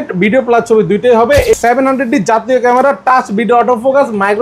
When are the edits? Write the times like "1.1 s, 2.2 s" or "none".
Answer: 1.5 s